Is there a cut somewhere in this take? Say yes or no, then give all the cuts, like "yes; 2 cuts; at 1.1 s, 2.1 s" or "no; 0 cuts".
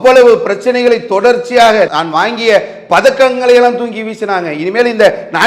no; 0 cuts